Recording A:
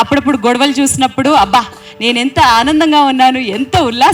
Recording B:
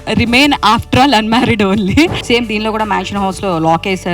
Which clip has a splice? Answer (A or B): B